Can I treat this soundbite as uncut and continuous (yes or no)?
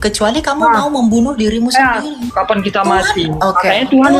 no